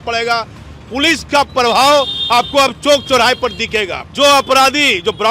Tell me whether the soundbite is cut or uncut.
cut